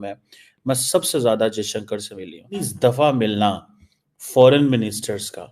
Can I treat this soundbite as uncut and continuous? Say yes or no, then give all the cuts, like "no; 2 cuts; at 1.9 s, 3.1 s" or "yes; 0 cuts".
no; 1 cut; at 2.7 s